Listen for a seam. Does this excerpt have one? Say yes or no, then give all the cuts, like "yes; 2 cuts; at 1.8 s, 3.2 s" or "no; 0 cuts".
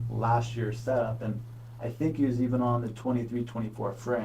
no; 0 cuts